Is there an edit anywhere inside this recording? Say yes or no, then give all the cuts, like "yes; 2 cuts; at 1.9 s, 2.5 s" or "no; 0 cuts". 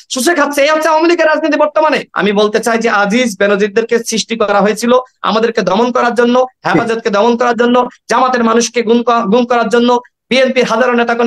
yes; 1 cut; at 2.1 s